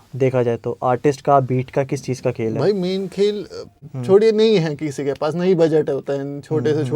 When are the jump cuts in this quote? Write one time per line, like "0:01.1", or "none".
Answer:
0:03.8